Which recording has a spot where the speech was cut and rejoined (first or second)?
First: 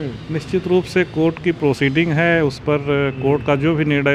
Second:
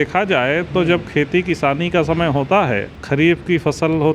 second